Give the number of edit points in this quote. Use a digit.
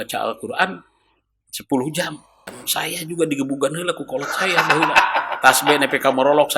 1